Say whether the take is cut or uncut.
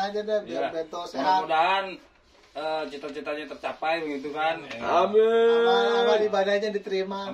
uncut